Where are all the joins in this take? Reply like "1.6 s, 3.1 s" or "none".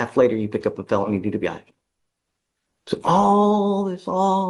none